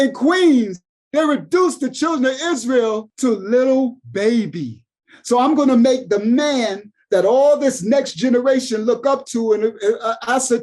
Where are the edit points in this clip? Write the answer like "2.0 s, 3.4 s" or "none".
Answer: 3.1 s

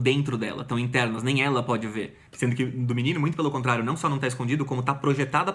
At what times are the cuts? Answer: none

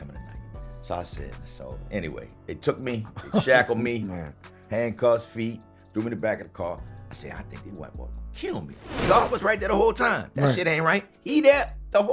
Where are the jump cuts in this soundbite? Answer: 9.0 s

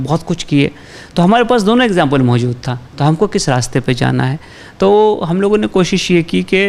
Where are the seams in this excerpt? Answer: none

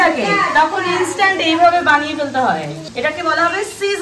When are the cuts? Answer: 2.8 s

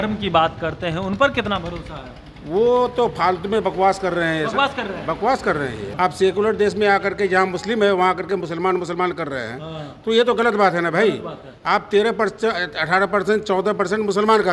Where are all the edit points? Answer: 5.9 s

